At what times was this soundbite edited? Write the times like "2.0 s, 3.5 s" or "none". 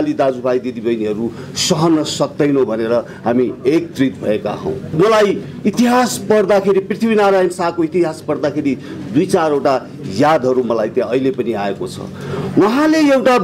4.9 s

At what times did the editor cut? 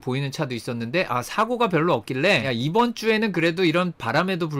none

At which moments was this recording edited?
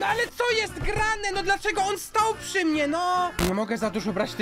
3.3 s

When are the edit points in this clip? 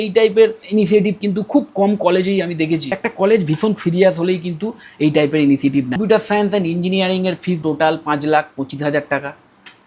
3.0 s, 6.0 s

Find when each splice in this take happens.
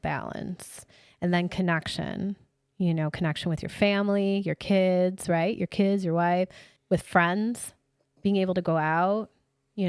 6.7 s

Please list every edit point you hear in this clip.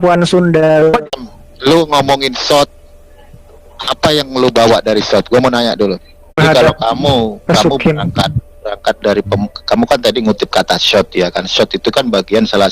0.9 s, 6.4 s

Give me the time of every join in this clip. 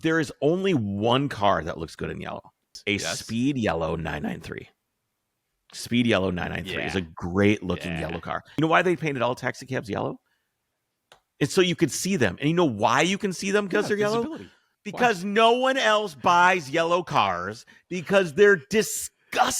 2.8 s, 8.5 s

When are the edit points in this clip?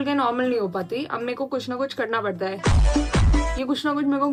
none

